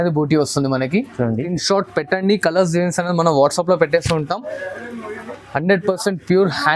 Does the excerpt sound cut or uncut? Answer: cut